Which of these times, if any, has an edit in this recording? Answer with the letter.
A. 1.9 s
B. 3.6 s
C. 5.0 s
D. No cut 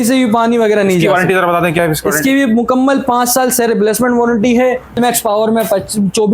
C